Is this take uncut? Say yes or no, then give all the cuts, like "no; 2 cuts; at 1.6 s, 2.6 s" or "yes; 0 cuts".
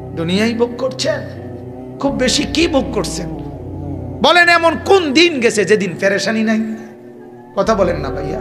yes; 0 cuts